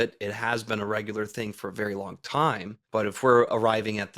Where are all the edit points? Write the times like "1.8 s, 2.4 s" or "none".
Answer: 2.7 s